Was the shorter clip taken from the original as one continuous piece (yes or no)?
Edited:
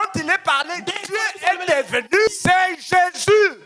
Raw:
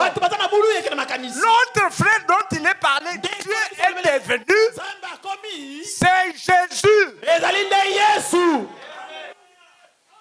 no